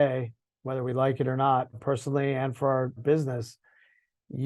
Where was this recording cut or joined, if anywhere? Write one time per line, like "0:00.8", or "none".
0:01.7
0:03.0